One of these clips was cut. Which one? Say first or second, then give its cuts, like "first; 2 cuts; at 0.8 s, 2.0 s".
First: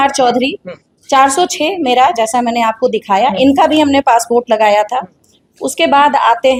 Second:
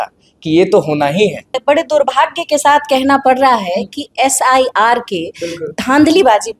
second; 1 cut; at 1.6 s